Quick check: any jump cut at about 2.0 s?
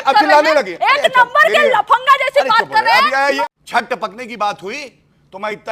no; 1 cut; at 3.4 s

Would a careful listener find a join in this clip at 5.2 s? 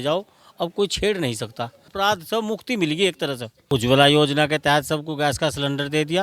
no; 2 cuts; at 1.8 s, 3.5 s

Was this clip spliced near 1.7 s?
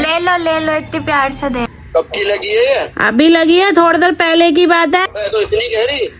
yes; 2 cuts; at 1.7 s, 5.1 s

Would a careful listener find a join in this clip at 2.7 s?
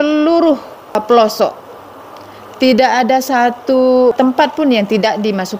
no; 2 cuts; at 1.0 s, 4.2 s

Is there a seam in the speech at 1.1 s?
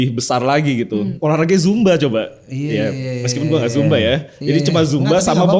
yes; 1 cut; at 1.1 s

